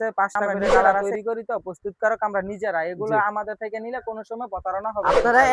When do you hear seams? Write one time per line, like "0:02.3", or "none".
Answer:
0:01.0